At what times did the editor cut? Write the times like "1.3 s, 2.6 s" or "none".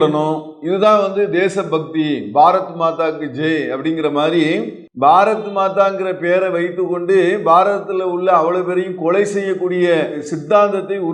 none